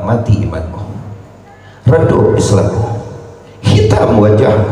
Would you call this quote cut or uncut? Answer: uncut